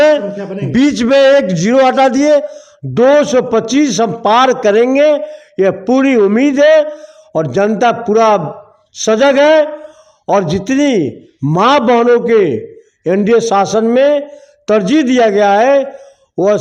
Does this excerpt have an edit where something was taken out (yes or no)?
no